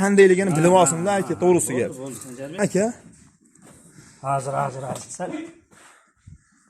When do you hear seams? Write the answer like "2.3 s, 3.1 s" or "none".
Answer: 2.6 s